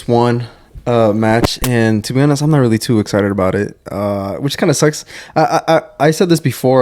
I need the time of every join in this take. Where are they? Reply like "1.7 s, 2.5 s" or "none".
none